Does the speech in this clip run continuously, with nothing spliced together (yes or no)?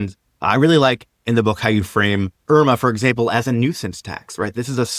yes